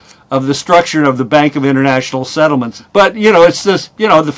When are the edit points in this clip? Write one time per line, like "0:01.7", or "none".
0:02.8

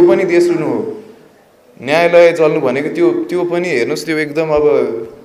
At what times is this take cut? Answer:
none

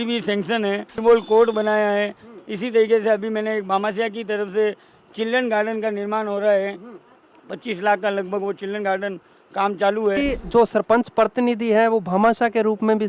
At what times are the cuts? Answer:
0:01.0
0:10.2

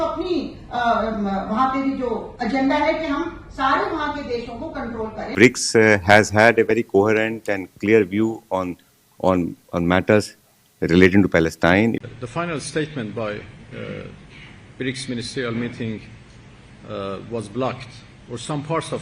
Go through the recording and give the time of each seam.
0:05.3
0:12.0

